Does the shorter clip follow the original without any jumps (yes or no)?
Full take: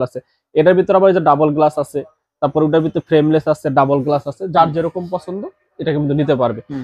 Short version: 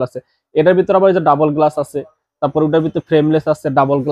yes